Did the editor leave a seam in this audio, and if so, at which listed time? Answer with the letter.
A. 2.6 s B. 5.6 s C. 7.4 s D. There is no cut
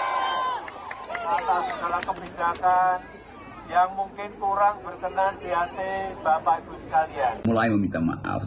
C